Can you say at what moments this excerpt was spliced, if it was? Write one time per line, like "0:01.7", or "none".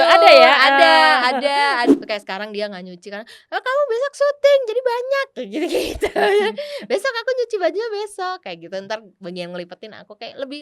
0:01.9